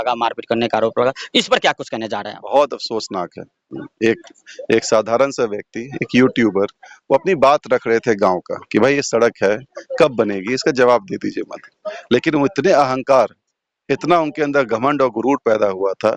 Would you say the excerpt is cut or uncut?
uncut